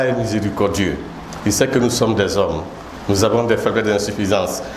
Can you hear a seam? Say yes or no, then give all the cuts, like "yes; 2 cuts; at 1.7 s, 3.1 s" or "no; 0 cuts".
no; 0 cuts